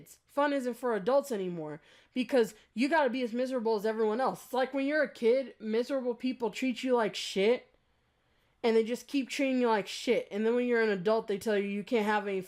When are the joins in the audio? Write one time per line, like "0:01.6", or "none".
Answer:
none